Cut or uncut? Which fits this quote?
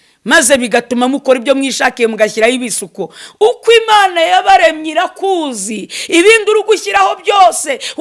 uncut